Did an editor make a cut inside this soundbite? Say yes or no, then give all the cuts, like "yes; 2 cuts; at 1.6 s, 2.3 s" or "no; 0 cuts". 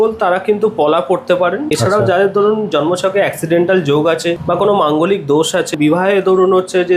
yes; 3 cuts; at 1.7 s, 4.4 s, 5.7 s